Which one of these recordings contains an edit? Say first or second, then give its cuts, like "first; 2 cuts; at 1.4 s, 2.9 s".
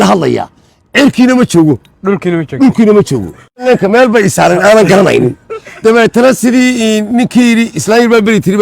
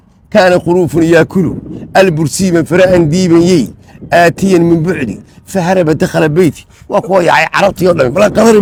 first; 1 cut; at 3.6 s